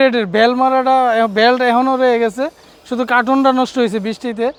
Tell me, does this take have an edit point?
no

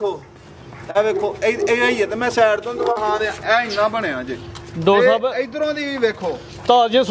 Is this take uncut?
yes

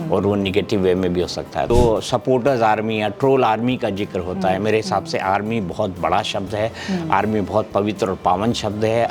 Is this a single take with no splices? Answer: no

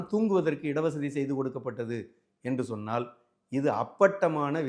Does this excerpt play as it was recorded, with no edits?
yes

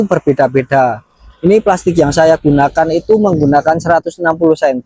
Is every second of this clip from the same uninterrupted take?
yes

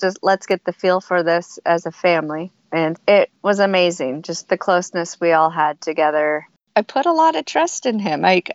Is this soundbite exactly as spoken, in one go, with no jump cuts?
no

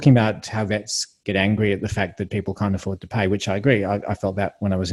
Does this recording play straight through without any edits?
yes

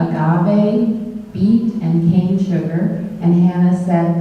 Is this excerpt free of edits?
no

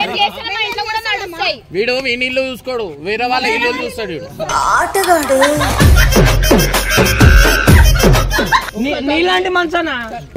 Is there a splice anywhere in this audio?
yes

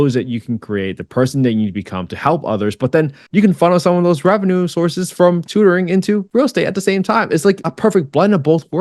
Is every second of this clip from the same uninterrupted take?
yes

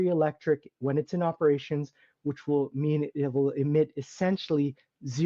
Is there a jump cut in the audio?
no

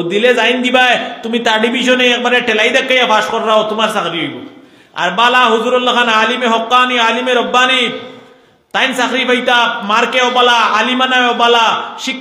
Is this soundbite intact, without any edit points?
yes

